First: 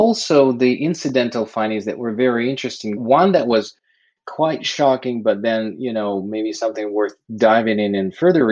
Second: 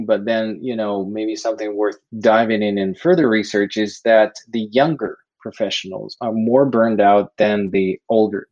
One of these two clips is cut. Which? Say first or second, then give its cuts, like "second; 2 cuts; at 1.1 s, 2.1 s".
first; 1 cut; at 3.0 s